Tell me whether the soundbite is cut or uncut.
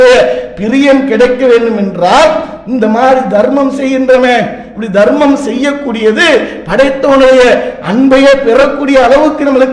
uncut